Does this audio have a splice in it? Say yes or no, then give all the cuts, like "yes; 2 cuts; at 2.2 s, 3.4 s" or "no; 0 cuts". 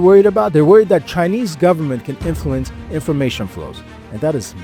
no; 0 cuts